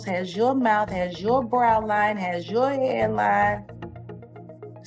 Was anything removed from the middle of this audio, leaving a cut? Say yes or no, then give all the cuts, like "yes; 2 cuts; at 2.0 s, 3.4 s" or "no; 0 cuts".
no; 0 cuts